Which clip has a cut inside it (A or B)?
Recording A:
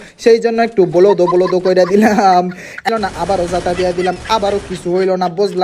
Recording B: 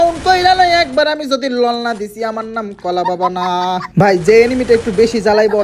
A